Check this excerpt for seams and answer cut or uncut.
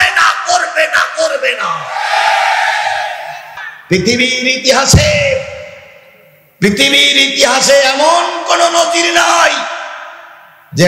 cut